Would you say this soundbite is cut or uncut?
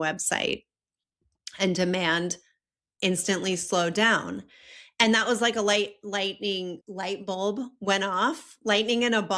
uncut